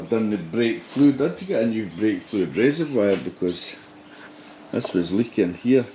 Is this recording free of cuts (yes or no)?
yes